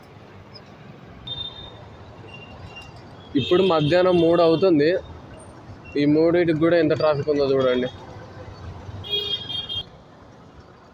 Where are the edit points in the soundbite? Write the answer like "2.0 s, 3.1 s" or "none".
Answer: 1.3 s, 9.8 s